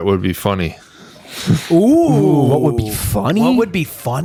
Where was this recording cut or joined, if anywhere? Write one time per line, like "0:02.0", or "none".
none